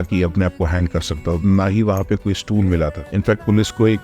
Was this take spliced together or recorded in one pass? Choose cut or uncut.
cut